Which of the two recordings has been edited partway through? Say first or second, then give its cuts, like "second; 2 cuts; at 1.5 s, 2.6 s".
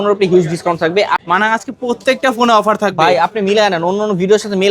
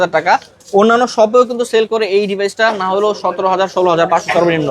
first; 1 cut; at 1.2 s